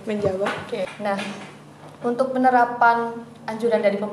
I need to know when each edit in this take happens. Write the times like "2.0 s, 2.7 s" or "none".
0.9 s

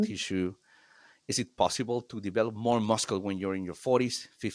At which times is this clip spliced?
none

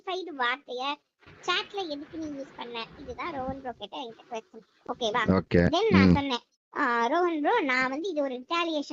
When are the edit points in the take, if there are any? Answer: none

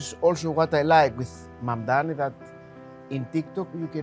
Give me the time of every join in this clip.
none

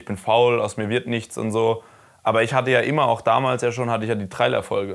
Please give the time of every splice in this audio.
none

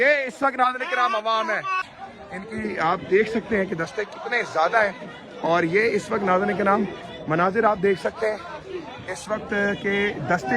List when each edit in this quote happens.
1.9 s

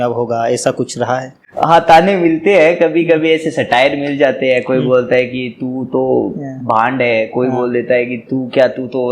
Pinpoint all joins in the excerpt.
1.4 s

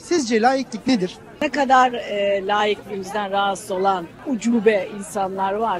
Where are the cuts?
1.3 s, 4.2 s

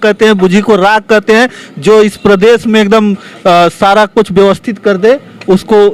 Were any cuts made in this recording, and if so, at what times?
none

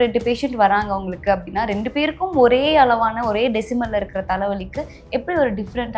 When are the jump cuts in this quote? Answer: none

